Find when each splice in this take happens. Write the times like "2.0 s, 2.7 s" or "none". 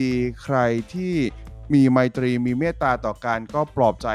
none